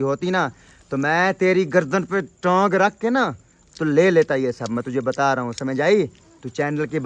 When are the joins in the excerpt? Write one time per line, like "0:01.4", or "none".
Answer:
none